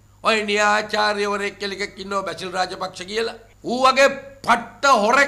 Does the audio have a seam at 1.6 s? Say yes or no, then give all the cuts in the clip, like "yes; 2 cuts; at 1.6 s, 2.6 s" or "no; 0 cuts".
no; 0 cuts